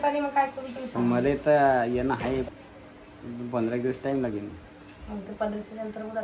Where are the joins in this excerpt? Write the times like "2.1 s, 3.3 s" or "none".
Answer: 2.5 s